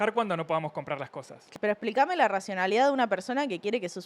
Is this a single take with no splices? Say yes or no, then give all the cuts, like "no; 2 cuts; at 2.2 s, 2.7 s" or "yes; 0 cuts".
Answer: no; 1 cut; at 1.4 s